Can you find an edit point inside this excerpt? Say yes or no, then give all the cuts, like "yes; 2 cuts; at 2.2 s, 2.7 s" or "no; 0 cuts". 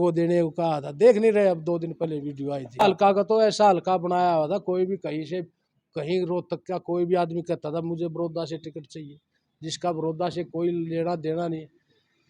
yes; 1 cut; at 2.8 s